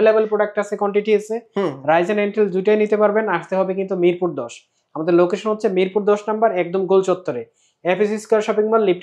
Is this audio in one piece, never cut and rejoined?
yes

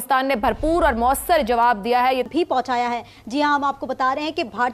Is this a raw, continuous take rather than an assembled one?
no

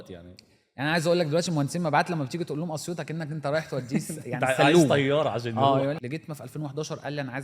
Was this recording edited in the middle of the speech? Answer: yes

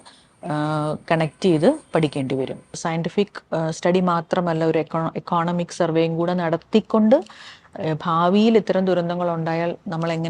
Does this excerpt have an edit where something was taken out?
yes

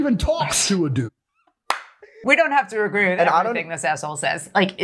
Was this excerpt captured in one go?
no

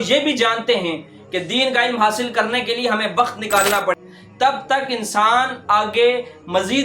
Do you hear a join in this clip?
yes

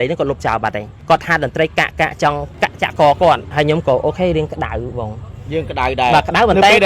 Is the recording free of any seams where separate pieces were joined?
no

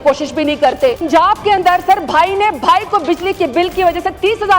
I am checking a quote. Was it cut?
yes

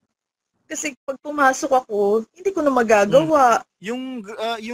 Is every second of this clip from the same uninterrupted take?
no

